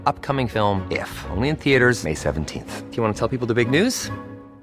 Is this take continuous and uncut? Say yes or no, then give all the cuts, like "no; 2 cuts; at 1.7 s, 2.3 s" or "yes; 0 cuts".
yes; 0 cuts